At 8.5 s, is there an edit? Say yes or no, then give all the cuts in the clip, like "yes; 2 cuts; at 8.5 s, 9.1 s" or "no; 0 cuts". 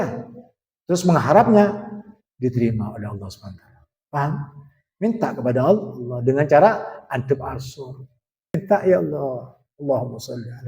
yes; 1 cut; at 8.5 s